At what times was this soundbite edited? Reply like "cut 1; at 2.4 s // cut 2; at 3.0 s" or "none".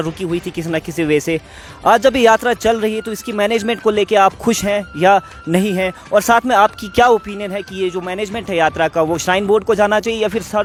none